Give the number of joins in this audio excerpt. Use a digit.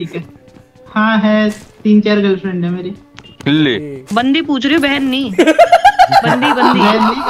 0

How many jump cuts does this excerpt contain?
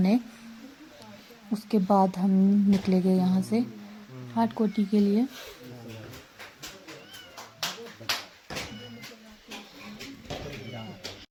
0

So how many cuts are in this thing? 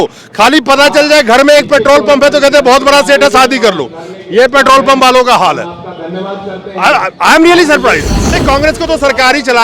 1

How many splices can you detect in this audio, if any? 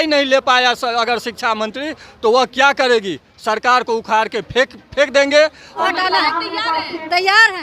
1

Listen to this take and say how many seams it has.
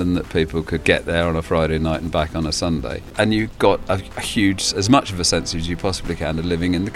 2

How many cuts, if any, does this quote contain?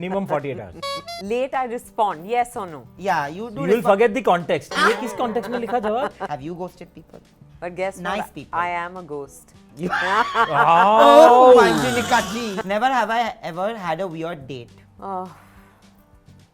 4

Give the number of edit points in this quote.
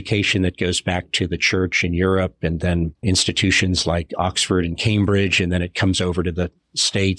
1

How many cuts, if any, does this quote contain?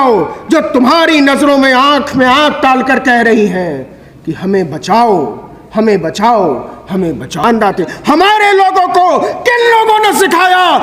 1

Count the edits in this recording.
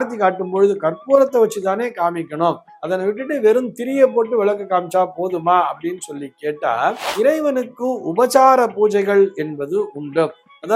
1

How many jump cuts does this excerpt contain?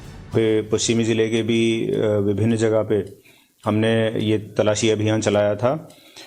1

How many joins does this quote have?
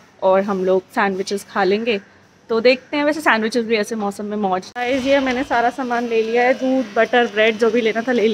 1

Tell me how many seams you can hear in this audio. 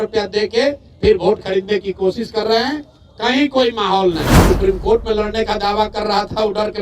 1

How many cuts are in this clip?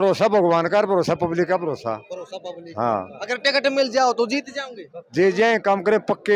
0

